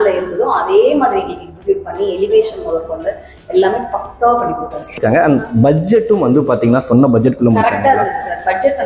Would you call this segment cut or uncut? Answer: cut